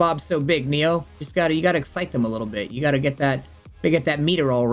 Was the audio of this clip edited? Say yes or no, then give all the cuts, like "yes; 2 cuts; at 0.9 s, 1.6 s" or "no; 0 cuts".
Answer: yes; 1 cut; at 1.2 s